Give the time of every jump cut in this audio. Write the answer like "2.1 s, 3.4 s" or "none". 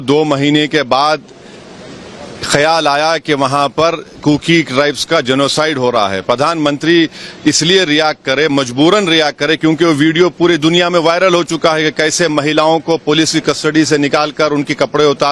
none